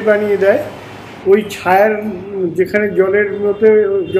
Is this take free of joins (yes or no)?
no